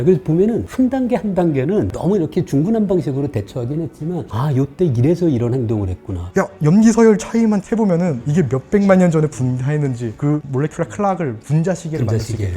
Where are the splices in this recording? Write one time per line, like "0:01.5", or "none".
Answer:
0:06.3
0:10.1